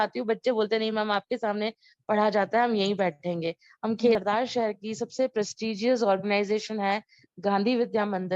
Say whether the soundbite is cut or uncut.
cut